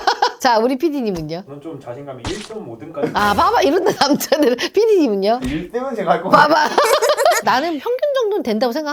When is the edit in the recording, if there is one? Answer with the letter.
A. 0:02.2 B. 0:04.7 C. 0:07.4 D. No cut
C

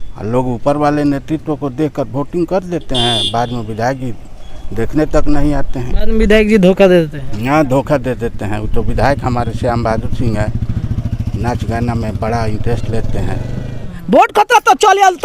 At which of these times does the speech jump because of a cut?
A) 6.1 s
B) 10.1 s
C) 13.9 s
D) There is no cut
C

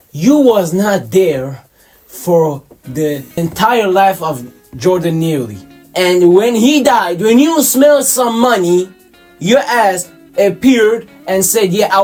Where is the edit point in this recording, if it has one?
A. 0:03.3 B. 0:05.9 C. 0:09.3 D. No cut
D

